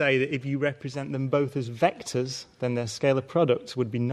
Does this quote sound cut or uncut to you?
cut